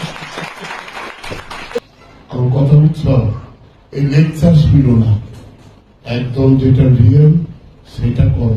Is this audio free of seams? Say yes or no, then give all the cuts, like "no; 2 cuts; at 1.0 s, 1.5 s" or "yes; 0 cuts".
no; 1 cut; at 1.8 s